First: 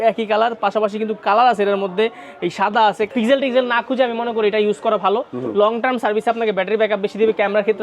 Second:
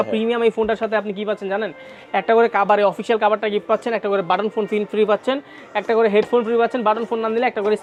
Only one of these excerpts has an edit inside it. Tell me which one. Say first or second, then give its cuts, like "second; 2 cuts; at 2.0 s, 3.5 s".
first; 1 cut; at 3.1 s